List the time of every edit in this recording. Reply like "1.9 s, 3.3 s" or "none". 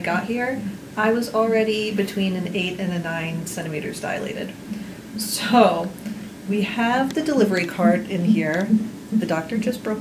none